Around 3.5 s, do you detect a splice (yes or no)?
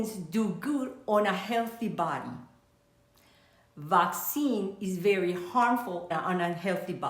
no